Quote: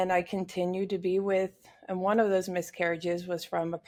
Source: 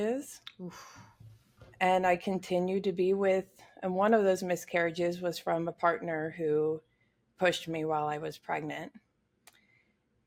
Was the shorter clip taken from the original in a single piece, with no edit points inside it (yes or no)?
yes